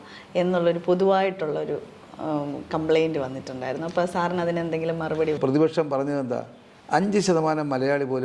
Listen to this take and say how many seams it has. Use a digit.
1